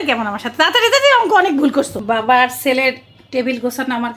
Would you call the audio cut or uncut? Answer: cut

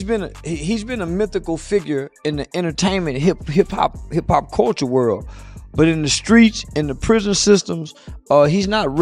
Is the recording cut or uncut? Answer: uncut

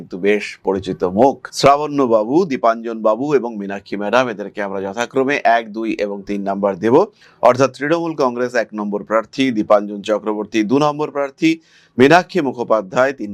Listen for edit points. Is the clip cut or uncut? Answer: uncut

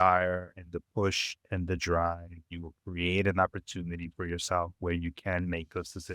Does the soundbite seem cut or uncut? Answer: uncut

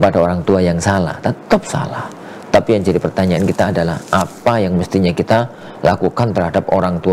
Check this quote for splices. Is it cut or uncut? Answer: uncut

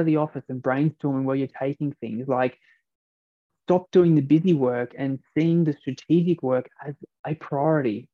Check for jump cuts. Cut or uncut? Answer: uncut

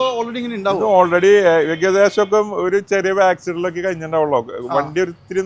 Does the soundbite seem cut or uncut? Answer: uncut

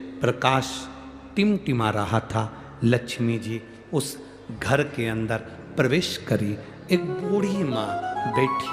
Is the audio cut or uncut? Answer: uncut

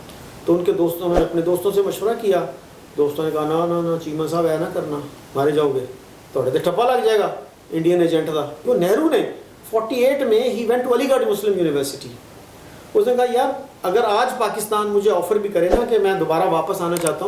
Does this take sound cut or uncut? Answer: cut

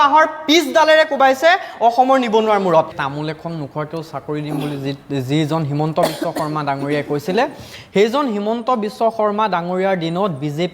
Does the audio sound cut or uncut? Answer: cut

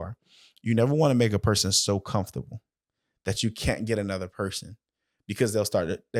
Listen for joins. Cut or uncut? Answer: uncut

